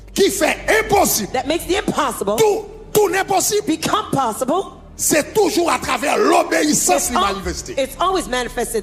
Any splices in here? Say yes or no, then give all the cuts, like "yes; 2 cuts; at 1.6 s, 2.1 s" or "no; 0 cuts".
no; 0 cuts